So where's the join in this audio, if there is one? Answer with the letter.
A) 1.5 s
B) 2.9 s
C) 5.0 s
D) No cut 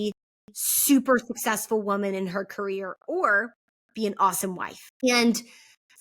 C